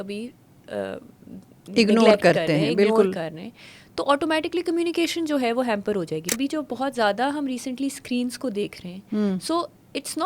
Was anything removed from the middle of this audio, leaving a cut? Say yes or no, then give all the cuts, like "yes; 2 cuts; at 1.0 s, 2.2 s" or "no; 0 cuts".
yes; 1 cut; at 6.3 s